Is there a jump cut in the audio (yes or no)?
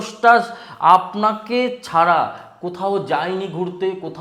no